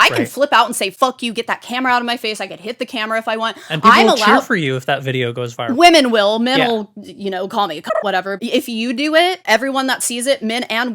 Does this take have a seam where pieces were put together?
yes; 3 cuts; at 0.9 s, 8.4 s, 9.4 s

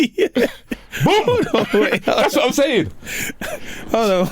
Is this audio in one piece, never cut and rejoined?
yes; 0 cuts

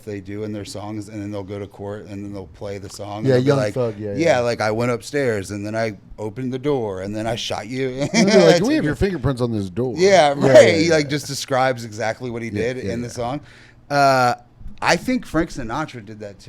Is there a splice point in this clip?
no; 0 cuts

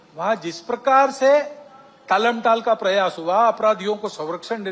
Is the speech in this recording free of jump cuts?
yes; 0 cuts

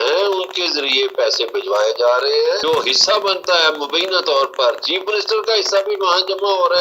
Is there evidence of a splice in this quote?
yes; 1 cut; at 2.6 s

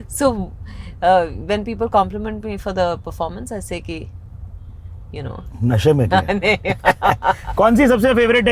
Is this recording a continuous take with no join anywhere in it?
no; 1 cut; at 7.4 s

